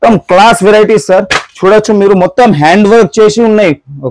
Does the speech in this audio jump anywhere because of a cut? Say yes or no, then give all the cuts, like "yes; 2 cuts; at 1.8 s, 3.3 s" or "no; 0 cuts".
no; 0 cuts